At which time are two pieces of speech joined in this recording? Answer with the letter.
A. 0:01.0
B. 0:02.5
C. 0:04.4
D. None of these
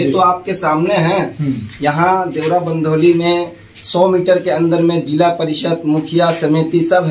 D